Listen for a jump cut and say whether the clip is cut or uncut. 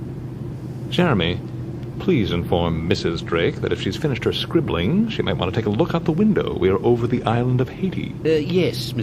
cut